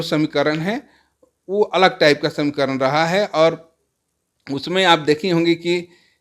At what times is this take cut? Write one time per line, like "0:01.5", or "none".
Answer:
none